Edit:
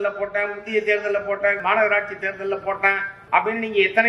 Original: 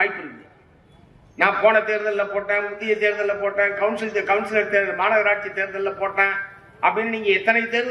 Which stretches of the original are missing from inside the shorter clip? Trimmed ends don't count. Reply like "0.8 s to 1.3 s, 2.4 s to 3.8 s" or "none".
3.7 s to 4.9 s, 6.5 s to 6.6 s